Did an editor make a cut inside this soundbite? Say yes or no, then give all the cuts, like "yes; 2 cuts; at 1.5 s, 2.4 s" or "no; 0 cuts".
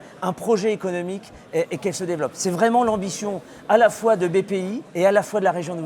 yes; 1 cut; at 4.8 s